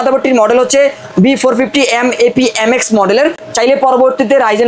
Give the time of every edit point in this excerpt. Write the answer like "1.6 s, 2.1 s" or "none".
none